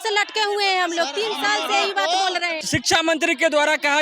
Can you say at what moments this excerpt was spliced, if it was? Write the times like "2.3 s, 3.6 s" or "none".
2.6 s